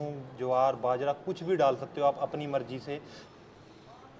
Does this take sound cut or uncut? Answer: cut